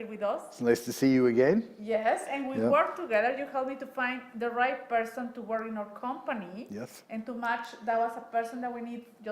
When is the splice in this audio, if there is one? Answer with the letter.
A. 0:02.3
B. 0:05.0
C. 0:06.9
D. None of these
A